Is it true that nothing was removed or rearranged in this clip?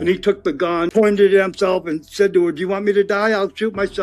no; 1 cut; at 0.9 s

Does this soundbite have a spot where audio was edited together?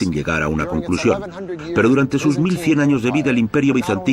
no; 0 cuts

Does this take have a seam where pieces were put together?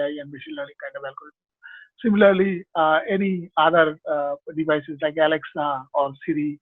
no; 0 cuts

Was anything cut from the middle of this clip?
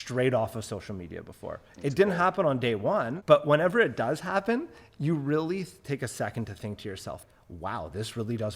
yes; 2 cuts; at 3.1 s, 7.2 s

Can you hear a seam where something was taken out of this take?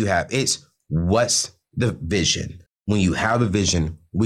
no; 0 cuts

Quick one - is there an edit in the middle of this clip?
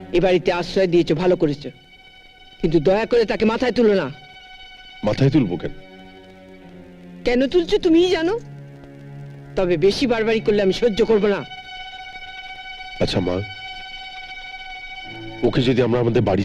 no; 0 cuts

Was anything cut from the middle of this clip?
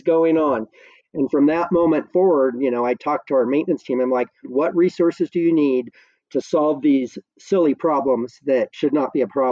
yes; 1 cut; at 4.5 s

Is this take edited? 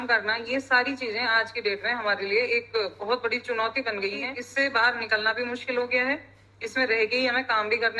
yes; 1 cut; at 4.4 s

